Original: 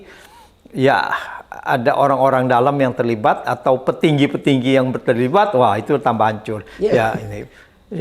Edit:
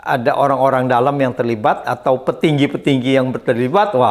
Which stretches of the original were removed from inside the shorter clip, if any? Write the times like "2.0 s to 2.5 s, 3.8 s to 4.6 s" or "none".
none